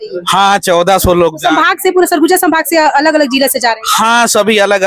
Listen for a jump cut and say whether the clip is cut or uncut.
uncut